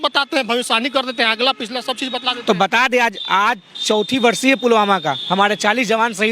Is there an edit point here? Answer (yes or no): no